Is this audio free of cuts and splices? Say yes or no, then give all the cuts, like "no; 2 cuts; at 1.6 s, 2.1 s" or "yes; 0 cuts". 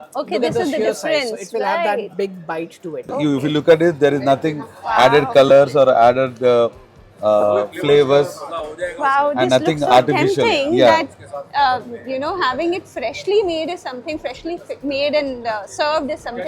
no; 1 cut; at 3.1 s